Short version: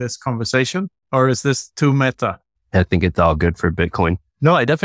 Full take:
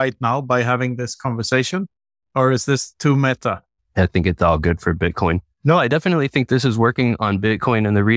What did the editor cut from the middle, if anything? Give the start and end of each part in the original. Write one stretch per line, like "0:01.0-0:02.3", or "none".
0:02.0-0:02.2